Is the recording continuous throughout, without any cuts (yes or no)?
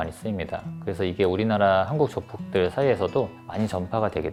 yes